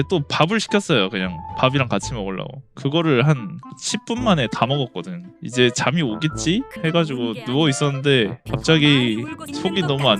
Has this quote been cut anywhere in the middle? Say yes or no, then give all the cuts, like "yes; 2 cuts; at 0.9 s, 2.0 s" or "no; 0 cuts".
yes; 2 cuts; at 2.6 s, 5.3 s